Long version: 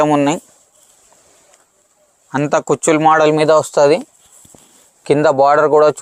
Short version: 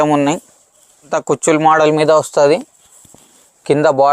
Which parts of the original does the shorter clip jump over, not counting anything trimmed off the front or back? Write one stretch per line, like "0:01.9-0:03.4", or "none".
0:01.1-0:02.5

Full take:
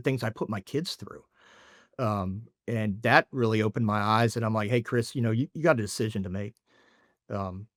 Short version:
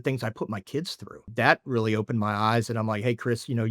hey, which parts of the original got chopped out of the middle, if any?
0:01.3-0:03.0

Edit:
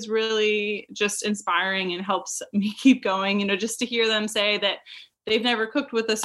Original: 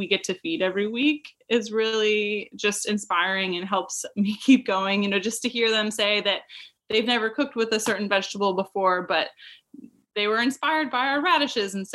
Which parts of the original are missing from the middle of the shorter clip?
none

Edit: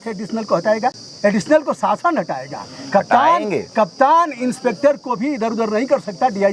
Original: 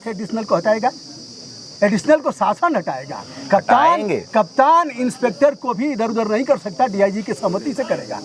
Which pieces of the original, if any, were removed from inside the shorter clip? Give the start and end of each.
0:01.1-0:01.6

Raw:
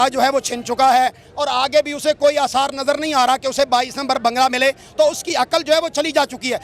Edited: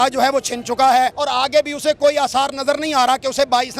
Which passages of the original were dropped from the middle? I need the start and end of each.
0:01.2-0:01.4

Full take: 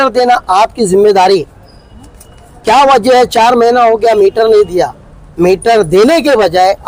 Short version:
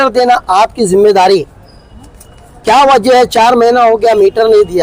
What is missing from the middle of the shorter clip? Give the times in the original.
none

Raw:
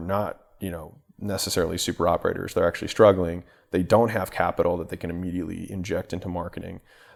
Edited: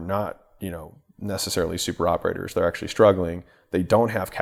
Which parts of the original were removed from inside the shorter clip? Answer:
none

